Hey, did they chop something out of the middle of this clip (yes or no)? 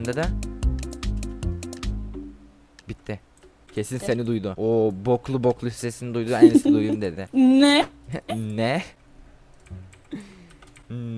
no